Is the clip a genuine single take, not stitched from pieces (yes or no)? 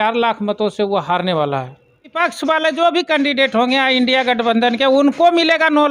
no